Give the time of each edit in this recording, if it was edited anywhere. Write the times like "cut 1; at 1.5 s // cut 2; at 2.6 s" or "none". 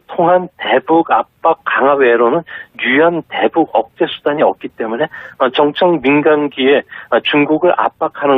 cut 1; at 2.6 s